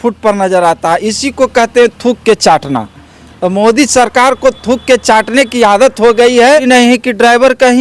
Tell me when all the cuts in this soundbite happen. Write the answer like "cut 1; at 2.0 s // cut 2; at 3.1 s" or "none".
cut 1; at 6.6 s